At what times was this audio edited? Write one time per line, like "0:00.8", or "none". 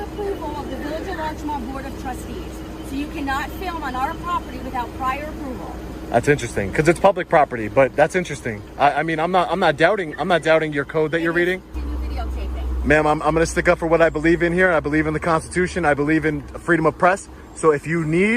0:11.8